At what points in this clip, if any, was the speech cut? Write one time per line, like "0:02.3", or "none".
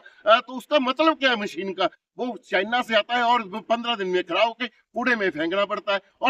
none

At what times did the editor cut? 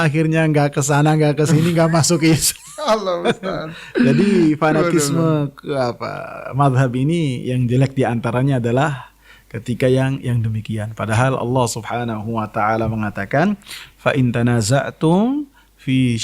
none

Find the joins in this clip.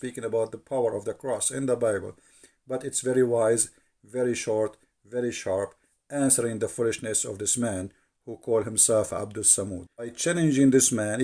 0:10.2

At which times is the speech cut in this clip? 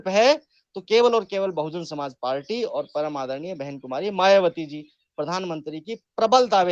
none

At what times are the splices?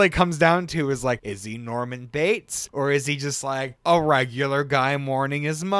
0:01.3
0:02.6

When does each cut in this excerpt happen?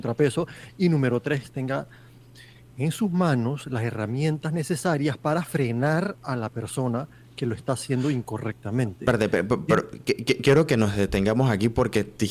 none

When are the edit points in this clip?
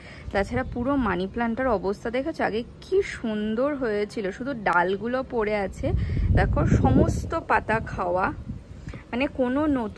none

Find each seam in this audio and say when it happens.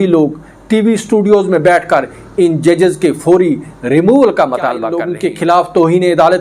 0:05.0

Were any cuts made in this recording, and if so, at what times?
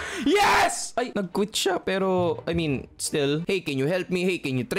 0:03.4

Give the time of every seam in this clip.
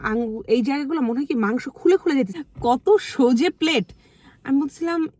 0:02.3

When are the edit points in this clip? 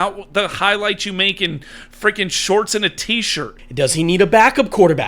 0:03.6

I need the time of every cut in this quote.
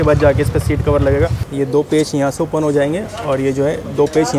0:01.4

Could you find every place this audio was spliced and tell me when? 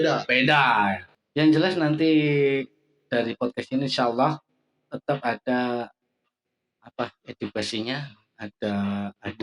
0:01.1

